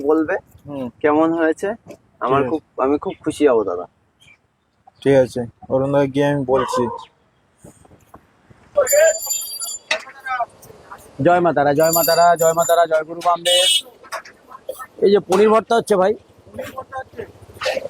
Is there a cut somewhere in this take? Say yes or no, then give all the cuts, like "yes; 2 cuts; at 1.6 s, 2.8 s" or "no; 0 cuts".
no; 0 cuts